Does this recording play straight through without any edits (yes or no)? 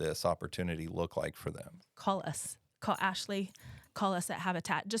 no